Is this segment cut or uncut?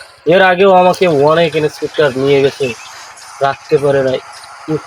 uncut